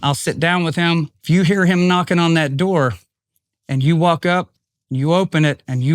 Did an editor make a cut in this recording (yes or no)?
yes